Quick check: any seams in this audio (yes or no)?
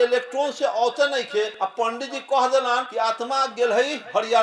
yes